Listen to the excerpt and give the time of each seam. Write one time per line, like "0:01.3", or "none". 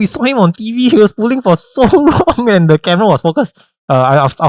none